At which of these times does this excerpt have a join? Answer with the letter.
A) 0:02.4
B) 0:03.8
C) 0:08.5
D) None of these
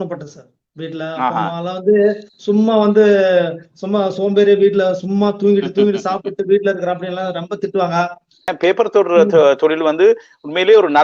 C